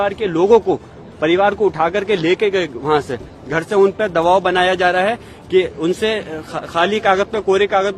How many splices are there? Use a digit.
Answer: 0